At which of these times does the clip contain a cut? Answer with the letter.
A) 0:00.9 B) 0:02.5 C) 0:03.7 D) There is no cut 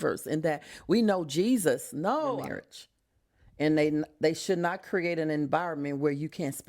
B